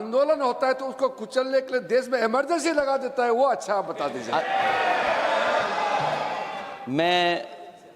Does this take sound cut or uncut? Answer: cut